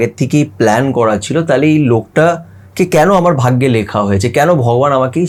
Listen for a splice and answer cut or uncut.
uncut